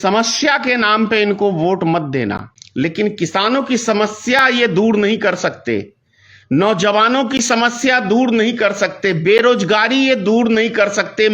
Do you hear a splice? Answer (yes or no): yes